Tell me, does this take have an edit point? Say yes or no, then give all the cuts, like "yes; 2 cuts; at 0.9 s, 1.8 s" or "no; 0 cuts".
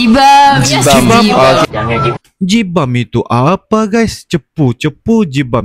no; 0 cuts